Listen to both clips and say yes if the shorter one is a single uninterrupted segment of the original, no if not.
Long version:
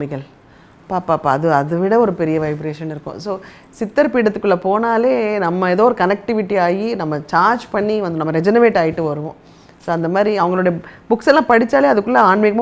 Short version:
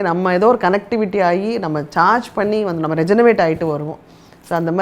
yes